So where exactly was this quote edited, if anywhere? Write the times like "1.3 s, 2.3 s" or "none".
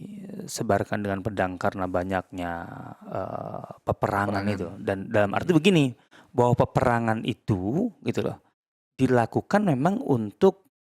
none